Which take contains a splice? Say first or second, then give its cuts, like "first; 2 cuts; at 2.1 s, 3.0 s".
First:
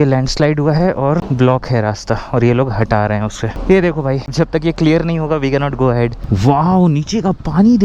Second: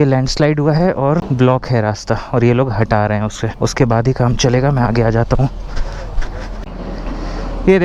first; 3 cuts; at 3.5 s, 4.3 s, 6.2 s